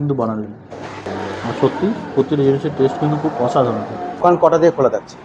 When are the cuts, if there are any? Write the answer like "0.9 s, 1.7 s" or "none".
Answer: 1.1 s, 4.2 s